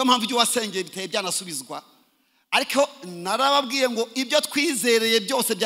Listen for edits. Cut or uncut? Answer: uncut